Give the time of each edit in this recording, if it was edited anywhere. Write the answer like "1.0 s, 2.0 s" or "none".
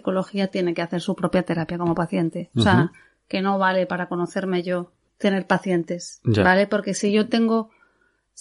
5.0 s